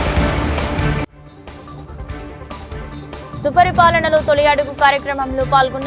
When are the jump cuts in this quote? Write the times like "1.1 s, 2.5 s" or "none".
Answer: none